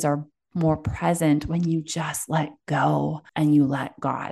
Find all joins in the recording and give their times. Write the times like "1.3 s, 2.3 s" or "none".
3.2 s